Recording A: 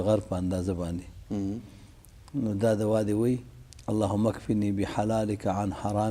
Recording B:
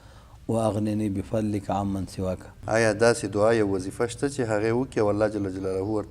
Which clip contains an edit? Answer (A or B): B